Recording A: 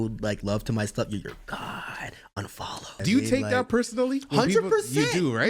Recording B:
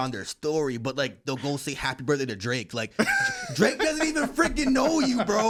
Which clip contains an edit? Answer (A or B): A